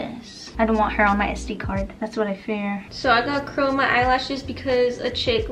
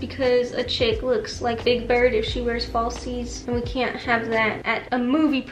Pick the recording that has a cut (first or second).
first